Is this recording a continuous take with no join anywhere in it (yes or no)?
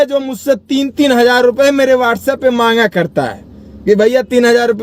yes